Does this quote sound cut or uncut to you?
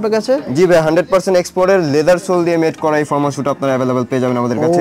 uncut